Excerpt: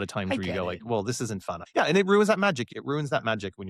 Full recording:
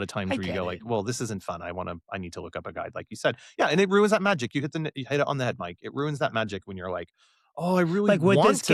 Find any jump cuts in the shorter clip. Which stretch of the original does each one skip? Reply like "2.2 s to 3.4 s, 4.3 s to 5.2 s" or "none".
1.6 s to 3.5 s, 4.5 s to 5.7 s